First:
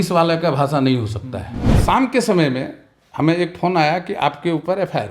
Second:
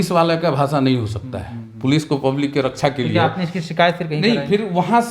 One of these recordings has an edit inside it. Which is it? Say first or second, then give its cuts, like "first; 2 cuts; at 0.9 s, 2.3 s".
first; 1 cut; at 1.8 s